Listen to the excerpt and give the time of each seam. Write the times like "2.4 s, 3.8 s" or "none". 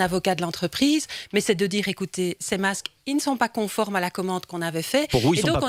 none